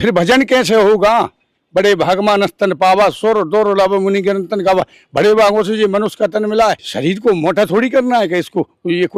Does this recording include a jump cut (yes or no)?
yes